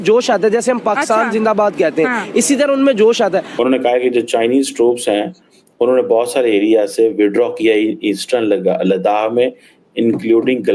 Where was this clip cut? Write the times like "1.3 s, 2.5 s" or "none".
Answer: 3.6 s